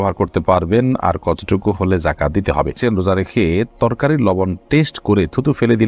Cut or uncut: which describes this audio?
cut